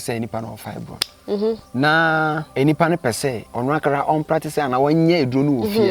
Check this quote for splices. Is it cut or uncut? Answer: cut